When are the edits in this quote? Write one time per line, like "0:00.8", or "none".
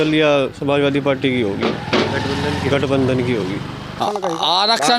0:04.0